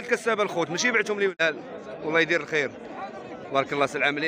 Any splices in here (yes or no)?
yes